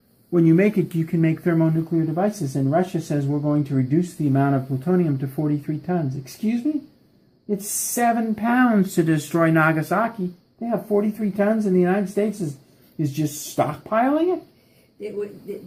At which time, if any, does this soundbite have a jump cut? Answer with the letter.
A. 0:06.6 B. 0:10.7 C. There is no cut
C